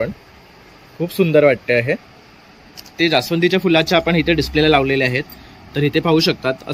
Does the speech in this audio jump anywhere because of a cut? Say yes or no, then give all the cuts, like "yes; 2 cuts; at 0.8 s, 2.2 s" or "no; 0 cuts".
yes; 1 cut; at 2.9 s